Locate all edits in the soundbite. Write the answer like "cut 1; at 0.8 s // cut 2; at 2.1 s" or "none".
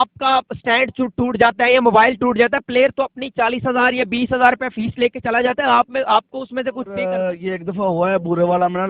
cut 1; at 7.1 s